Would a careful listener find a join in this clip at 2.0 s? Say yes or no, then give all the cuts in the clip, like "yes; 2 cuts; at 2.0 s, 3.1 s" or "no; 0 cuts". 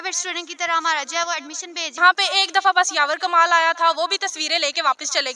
yes; 1 cut; at 2.0 s